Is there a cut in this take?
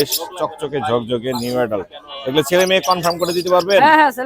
no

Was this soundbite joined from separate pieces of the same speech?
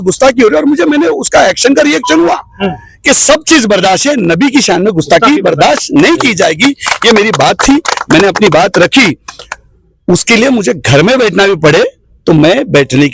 no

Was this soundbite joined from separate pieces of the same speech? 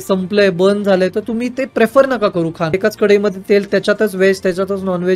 yes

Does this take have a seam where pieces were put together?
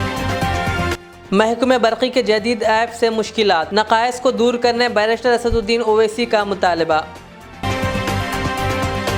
no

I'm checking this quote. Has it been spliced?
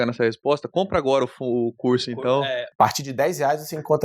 yes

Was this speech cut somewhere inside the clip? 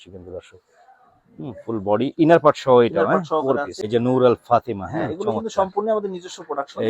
yes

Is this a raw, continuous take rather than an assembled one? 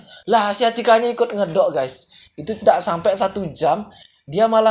yes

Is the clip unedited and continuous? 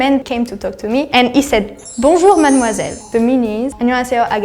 no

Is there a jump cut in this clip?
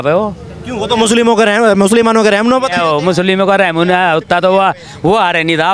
no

